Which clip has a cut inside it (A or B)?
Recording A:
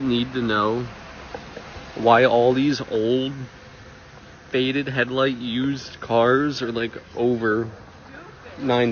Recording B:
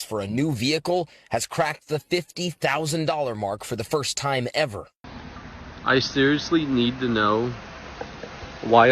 B